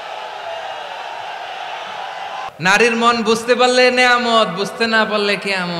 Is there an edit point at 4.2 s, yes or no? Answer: no